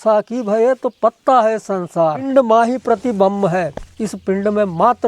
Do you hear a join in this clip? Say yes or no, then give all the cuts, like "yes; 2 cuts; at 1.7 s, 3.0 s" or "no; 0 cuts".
yes; 1 cut; at 2.3 s